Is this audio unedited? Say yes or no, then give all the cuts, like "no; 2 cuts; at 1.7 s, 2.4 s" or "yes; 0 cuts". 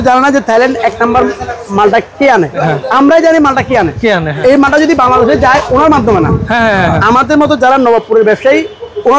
no; 2 cuts; at 2.6 s, 4.3 s